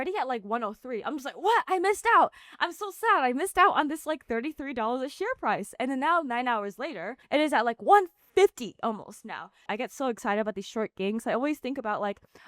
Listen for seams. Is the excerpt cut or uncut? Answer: cut